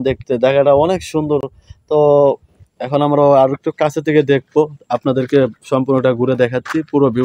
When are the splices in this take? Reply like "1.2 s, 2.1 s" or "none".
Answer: none